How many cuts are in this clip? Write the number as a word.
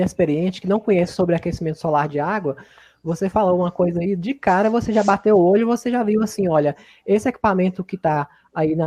zero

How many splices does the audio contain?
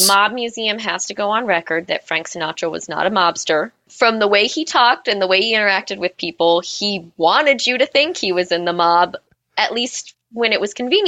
one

